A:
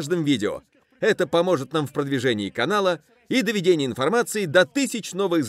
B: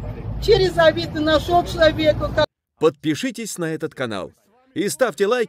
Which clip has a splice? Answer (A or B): B